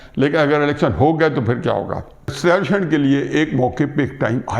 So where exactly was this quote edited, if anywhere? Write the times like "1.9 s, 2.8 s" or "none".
2.3 s